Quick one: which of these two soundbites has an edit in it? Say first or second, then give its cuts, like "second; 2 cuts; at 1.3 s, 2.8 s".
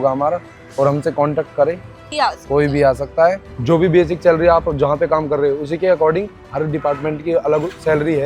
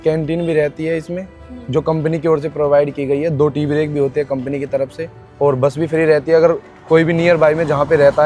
first; 2 cuts; at 2.0 s, 3.5 s